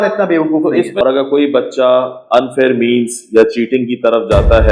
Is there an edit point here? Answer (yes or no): yes